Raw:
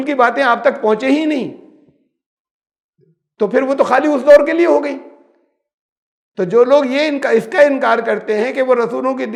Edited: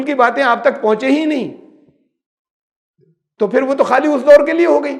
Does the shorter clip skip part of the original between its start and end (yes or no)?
no